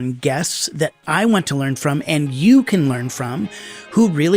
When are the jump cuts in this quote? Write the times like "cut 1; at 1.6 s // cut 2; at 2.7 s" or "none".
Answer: cut 1; at 1.0 s